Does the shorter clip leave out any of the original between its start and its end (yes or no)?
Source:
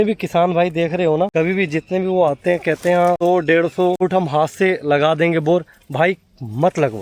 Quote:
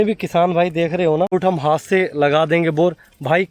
yes